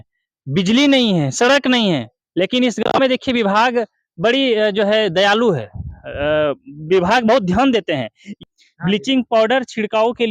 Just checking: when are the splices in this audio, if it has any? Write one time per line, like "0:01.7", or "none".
0:08.3